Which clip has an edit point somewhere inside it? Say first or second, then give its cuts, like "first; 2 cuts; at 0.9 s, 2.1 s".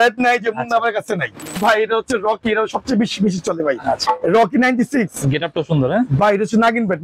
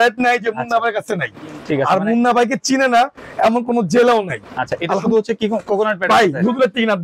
first; 1 cut; at 1.6 s